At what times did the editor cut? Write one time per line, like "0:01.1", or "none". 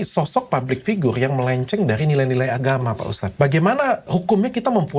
0:03.2
0:04.1